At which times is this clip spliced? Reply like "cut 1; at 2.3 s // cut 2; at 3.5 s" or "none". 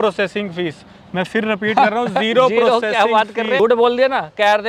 cut 1; at 3.6 s